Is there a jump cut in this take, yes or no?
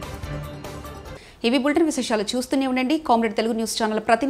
no